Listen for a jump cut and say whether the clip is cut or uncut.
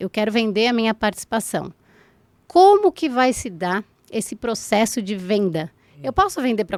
uncut